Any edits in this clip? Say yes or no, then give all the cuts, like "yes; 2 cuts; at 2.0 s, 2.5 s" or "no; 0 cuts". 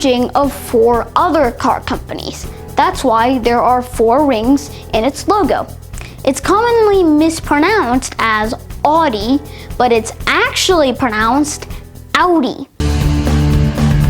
yes; 1 cut; at 12.7 s